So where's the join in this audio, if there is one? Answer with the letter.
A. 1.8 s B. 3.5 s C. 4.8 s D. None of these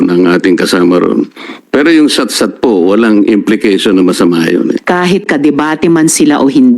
C